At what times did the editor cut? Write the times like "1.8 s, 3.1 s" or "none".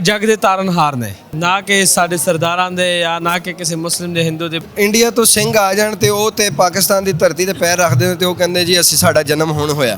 1.2 s, 4.6 s

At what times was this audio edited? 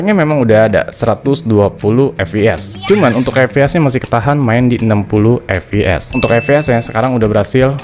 6.2 s

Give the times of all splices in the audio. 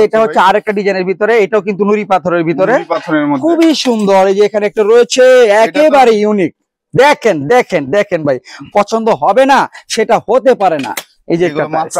none

